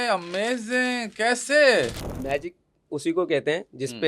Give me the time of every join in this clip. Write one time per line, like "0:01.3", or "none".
0:02.1